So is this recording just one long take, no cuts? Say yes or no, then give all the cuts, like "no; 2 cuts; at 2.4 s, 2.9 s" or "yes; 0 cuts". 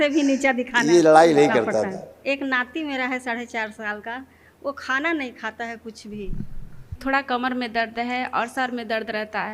no; 2 cuts; at 2.1 s, 7.0 s